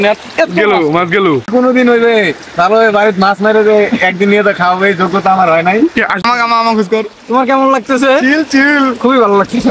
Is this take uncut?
no; 2 cuts; at 1.7 s, 6.2 s

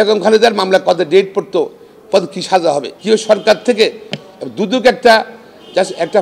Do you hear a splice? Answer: yes; 1 cut; at 2.9 s

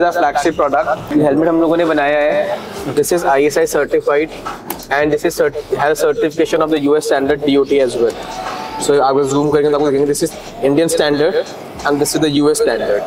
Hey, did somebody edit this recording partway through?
yes; 1 cut; at 1.0 s

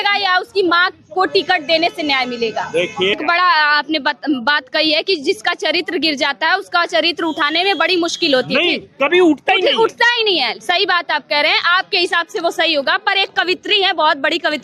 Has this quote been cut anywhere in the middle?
yes; 1 cut; at 3.1 s

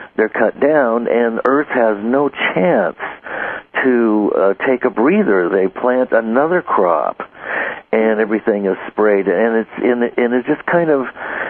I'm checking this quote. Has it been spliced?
no; 0 cuts

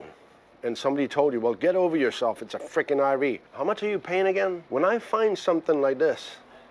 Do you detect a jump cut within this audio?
yes; 2 cuts; at 3.5 s, 4.6 s

